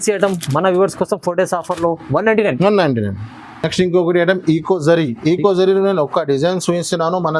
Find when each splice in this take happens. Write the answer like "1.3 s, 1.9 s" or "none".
none